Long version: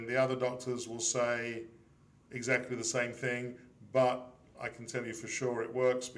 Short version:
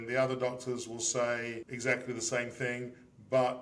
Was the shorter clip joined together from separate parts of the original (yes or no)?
yes